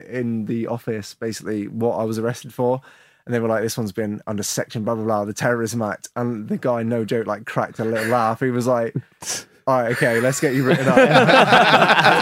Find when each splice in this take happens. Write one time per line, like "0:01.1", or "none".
none

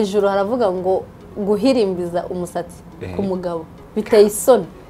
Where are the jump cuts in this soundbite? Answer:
0:03.8

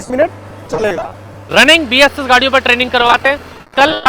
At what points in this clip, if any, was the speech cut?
0:01.3

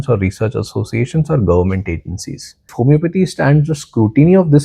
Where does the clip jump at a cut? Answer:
0:02.7

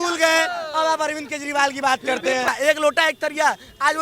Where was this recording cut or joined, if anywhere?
0:02.5

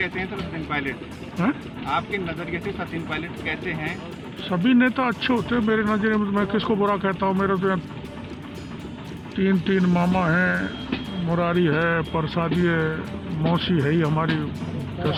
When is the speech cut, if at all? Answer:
none

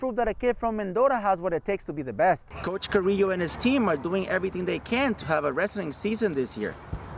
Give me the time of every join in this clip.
0:02.5

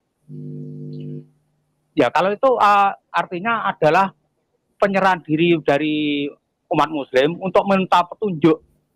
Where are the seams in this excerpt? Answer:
none

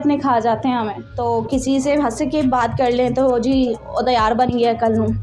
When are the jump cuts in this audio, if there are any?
0:01.0

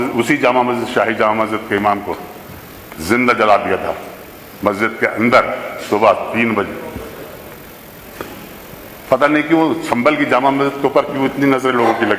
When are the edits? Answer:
none

